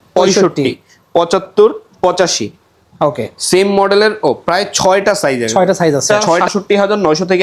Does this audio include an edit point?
yes; 1 cut; at 6.0 s

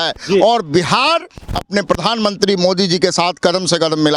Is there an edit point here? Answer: no; 0 cuts

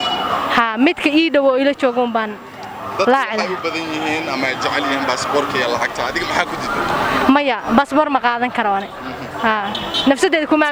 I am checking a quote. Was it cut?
no; 0 cuts

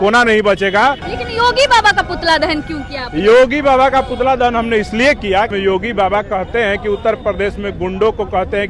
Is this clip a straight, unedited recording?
no; 2 cuts; at 1.1 s, 5.5 s

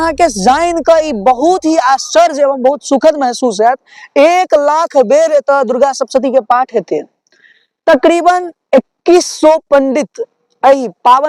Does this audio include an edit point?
no; 0 cuts

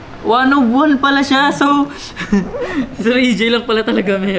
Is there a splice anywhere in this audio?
no; 0 cuts

